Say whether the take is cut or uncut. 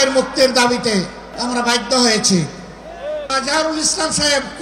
cut